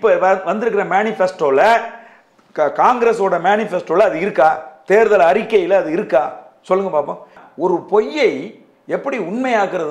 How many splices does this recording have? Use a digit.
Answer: 1